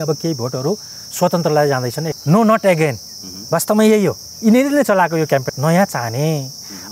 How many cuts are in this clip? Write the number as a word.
two